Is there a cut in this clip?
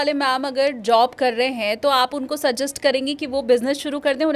no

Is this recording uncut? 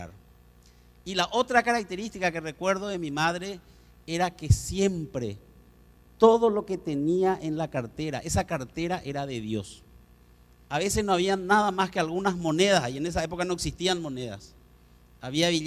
no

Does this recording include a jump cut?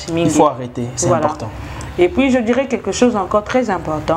no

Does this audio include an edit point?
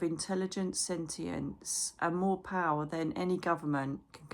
no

